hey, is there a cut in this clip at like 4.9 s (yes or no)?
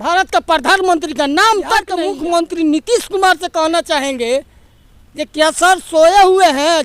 no